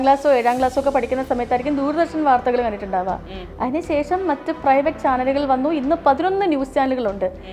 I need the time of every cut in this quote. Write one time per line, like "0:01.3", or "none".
none